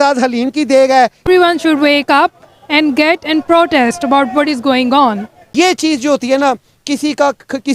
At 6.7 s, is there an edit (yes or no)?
no